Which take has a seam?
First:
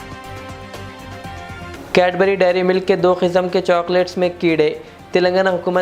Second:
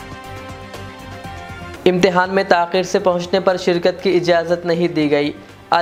first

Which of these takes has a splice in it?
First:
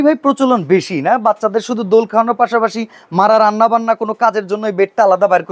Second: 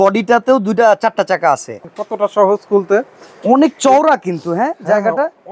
second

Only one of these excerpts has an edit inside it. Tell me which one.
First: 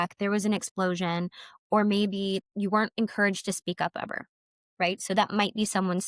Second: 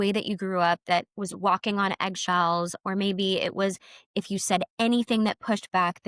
first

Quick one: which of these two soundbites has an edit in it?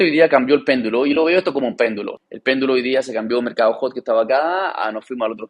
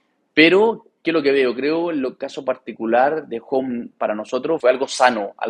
first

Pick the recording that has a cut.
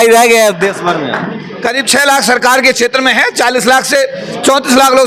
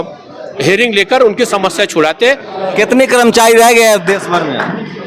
second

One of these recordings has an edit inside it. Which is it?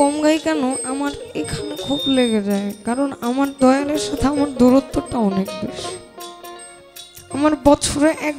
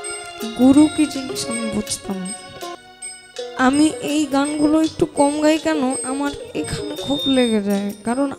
second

